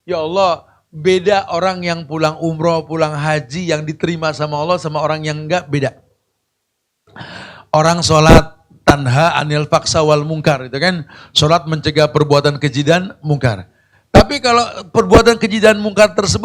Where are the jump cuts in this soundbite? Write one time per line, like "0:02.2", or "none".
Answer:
none